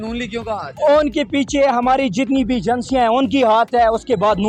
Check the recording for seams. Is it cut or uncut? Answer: uncut